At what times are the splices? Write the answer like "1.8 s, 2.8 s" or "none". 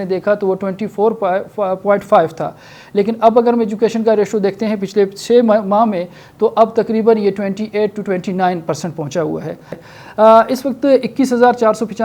9.8 s